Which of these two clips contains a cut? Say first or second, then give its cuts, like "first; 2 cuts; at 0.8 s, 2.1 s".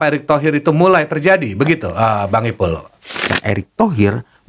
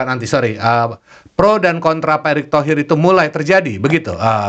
first; 1 cut; at 3.3 s